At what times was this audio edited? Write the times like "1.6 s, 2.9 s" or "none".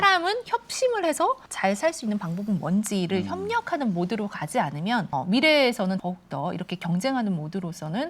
1.5 s, 5.1 s, 6.0 s